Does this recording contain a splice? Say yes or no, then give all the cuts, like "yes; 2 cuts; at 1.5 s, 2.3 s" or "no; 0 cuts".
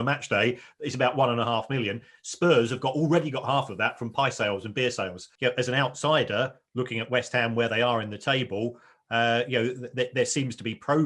yes; 1 cut; at 5.2 s